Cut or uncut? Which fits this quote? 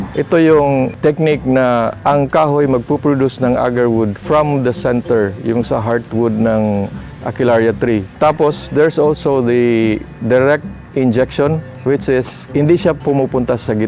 cut